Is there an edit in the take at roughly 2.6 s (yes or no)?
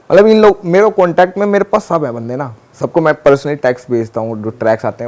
yes